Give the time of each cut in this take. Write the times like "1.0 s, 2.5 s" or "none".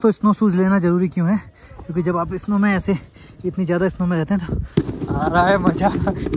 4.6 s